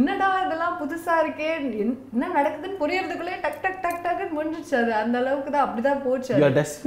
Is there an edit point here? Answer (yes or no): no